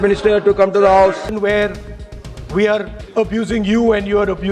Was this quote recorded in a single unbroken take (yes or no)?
no